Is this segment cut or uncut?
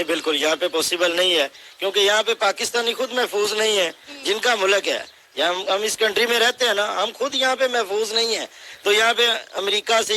uncut